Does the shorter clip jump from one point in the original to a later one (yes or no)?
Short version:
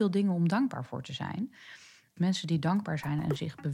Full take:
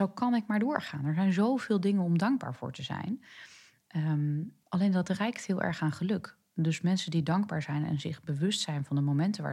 yes